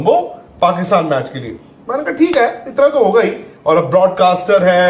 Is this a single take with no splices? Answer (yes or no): yes